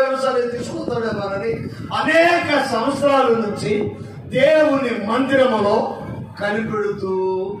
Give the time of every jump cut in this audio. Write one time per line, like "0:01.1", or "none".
none

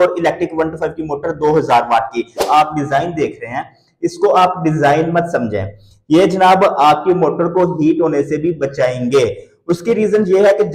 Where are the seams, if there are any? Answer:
0:02.5

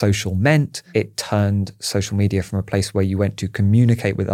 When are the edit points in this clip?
0:00.9

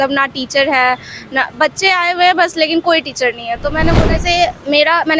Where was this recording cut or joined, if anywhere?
0:04.0

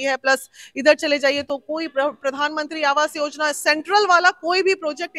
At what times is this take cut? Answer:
none

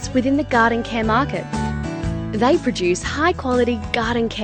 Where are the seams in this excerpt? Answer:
none

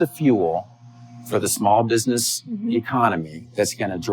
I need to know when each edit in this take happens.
none

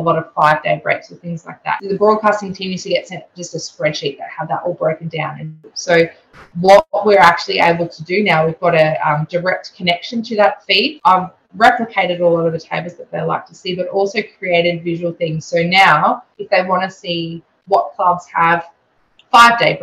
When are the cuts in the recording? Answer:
0:01.8
0:05.7
0:10.9

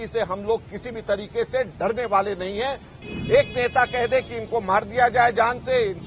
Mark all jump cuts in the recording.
0:02.9

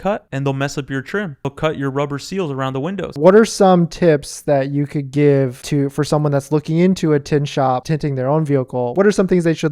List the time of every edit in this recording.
0:03.0
0:07.8
0:08.9

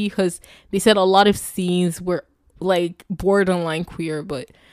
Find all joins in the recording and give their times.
none

